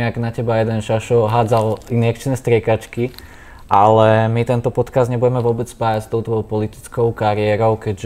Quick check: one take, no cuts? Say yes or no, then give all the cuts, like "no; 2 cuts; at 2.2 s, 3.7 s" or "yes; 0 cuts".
yes; 0 cuts